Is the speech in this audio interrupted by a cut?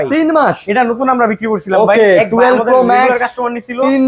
no; 0 cuts

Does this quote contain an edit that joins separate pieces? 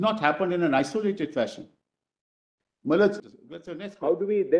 yes; 1 cut; at 3.3 s

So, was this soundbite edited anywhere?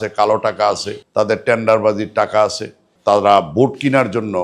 yes; 2 cuts; at 0.9 s, 2.9 s

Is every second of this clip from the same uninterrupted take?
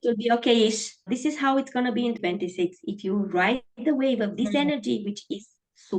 no; 2 cuts; at 1.1 s, 2.2 s

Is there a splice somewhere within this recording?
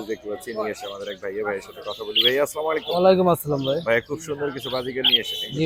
no; 0 cuts

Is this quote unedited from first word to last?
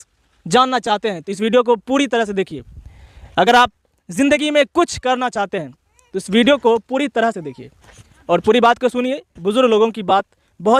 yes; 0 cuts

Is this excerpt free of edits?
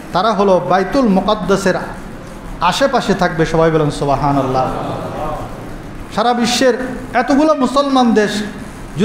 no; 1 cut; at 5.6 s

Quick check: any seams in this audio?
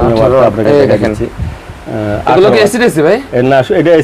no; 0 cuts

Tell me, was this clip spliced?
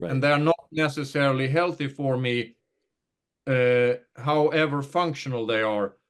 no; 0 cuts

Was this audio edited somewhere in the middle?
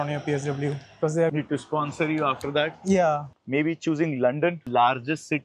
yes; 1 cut; at 3.3 s

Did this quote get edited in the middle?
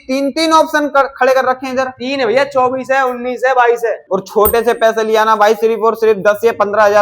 yes; 1 cut; at 4.0 s

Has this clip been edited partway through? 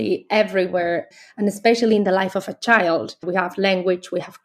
yes; 2 cuts; at 1.1 s, 3.2 s

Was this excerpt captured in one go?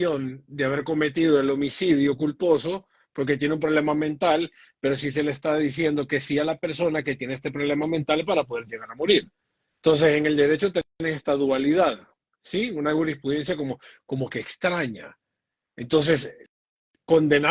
yes; 0 cuts

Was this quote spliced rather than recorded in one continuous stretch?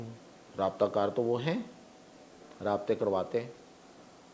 no; 0 cuts

